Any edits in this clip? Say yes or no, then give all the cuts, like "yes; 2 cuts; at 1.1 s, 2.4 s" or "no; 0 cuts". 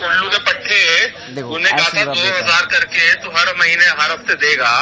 no; 0 cuts